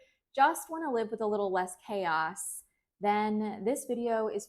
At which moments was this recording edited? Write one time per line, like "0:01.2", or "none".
none